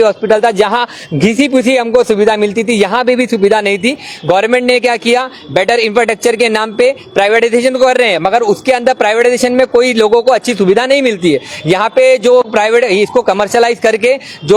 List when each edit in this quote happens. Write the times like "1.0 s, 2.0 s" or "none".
none